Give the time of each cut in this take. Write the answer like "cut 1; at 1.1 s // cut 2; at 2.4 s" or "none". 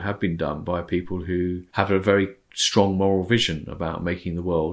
cut 1; at 1.6 s